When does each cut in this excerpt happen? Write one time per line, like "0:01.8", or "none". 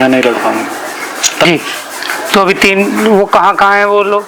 0:01.4